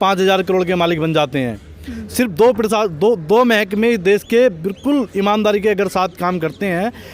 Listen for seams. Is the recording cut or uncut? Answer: uncut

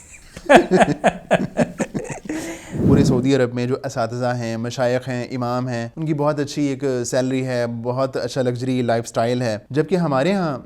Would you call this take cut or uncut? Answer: cut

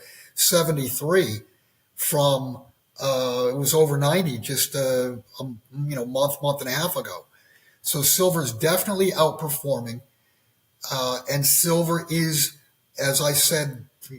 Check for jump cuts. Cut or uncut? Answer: uncut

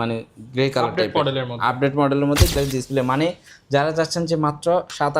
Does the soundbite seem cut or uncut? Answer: cut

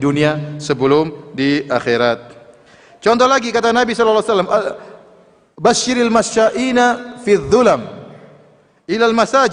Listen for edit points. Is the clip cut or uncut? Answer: uncut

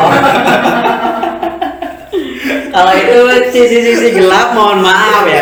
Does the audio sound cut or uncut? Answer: uncut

